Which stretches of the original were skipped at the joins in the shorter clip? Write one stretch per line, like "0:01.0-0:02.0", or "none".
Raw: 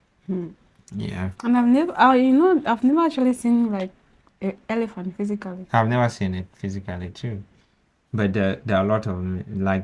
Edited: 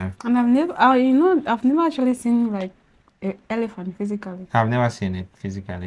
none

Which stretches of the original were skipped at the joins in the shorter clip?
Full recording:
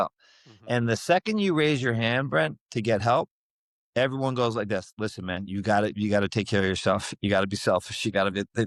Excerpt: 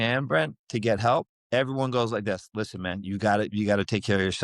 0:03.4-0:03.8

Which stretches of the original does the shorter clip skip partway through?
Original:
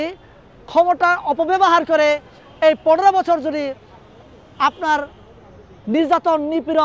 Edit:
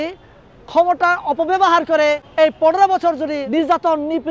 0:02.2-0:02.5
0:03.7-0:05.9

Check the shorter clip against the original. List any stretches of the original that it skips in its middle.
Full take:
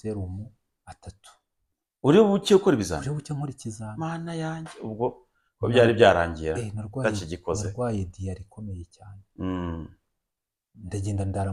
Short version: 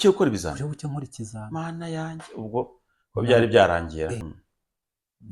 0:06.8-0:09.9

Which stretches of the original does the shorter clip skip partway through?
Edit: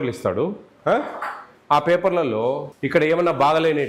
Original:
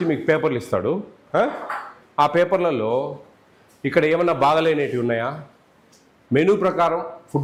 0:03.2-0:03.7

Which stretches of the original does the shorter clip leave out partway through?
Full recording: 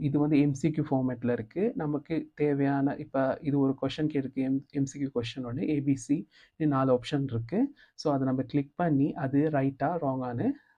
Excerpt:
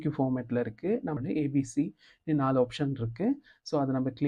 0:01.9-0:05.5

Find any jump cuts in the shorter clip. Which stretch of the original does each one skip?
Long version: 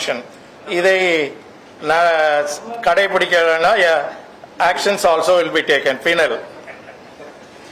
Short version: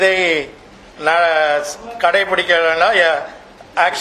none

